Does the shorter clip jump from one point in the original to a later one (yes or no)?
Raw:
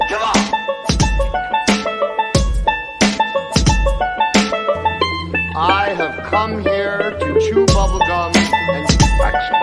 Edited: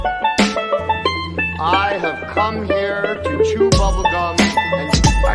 yes